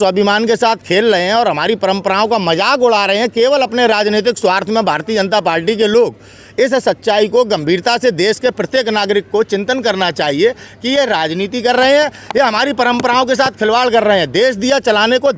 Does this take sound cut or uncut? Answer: uncut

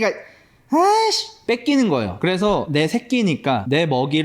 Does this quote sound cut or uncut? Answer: cut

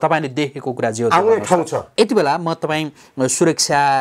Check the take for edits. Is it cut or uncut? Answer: cut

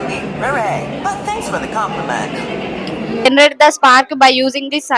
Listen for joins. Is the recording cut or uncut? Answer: cut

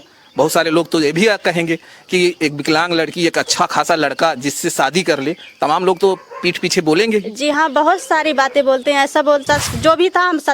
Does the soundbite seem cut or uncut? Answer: cut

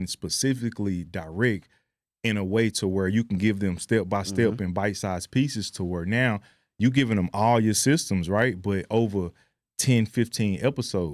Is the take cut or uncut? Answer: uncut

